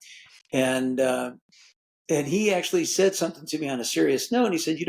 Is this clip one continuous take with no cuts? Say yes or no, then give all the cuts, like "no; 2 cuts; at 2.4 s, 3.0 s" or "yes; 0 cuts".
yes; 0 cuts